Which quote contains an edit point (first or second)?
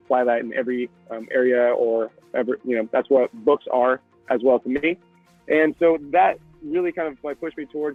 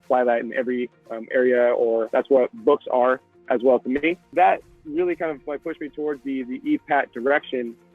second